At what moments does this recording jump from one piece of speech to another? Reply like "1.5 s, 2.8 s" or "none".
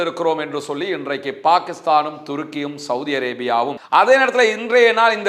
3.8 s

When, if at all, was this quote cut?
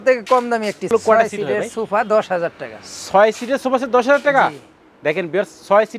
0.9 s

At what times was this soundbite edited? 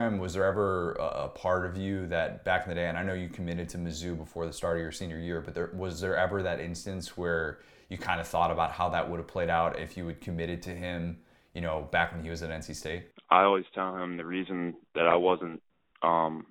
13.1 s

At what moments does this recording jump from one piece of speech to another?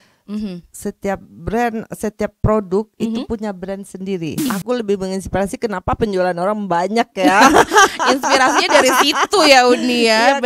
4.4 s

